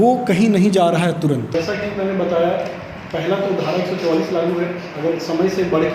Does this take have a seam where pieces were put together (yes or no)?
yes